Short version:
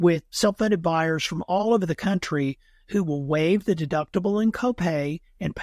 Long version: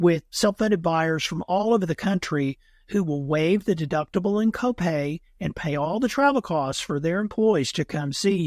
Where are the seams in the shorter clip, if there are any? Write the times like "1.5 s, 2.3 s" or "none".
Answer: none